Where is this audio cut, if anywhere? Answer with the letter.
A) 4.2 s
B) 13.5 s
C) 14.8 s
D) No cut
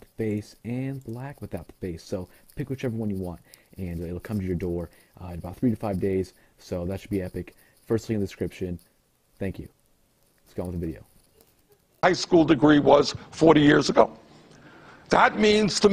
A